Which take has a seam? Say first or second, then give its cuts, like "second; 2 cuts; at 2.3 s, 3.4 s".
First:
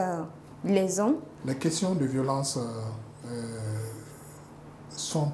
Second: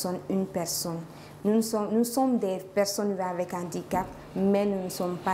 first; 1 cut; at 1.3 s